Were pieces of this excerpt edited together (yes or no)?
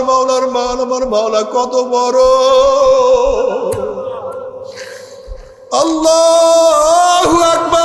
no